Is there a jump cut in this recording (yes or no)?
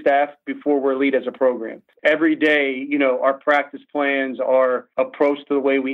yes